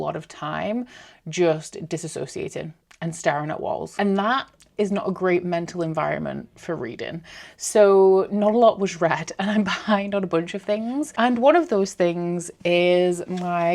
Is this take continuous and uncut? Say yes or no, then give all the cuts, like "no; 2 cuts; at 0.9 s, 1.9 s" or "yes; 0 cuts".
yes; 0 cuts